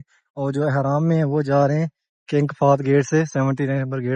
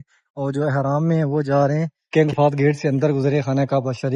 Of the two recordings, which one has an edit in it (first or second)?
second